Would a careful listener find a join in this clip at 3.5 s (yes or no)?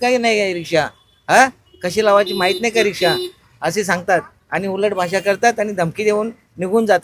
no